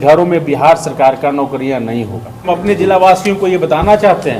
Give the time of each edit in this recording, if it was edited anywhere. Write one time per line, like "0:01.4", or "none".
0:02.5